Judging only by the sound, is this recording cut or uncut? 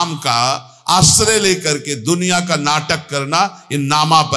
uncut